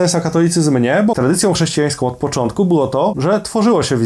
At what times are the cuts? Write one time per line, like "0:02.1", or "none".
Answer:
0:01.2
0:03.2